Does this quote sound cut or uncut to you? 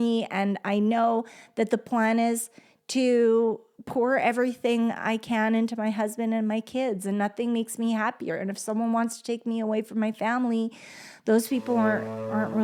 uncut